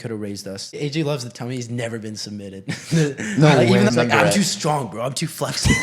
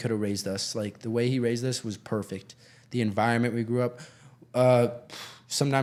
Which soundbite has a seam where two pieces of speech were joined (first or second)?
first